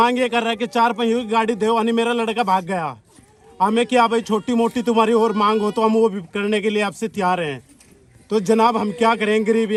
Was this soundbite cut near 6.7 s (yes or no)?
no